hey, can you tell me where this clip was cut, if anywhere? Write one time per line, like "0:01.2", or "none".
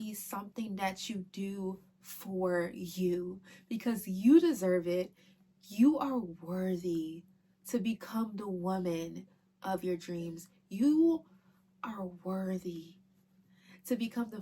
none